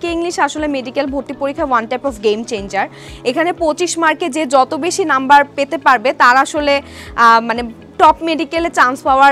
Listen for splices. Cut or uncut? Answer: uncut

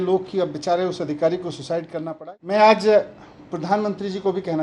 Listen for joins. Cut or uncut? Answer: cut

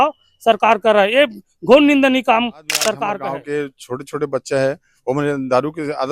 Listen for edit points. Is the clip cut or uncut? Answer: cut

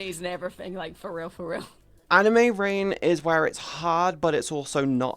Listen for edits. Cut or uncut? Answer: cut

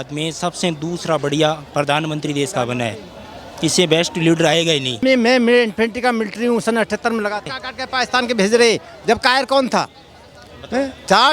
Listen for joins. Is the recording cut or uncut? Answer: cut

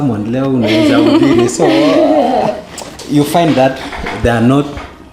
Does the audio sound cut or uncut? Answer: uncut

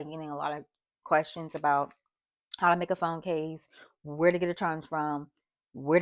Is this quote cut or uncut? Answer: uncut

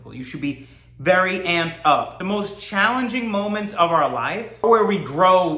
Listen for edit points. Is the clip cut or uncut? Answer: cut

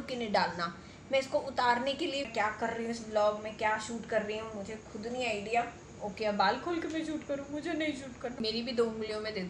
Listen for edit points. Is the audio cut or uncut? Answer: cut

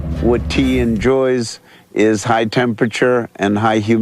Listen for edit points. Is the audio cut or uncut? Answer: uncut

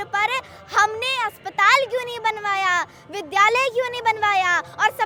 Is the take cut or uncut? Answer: uncut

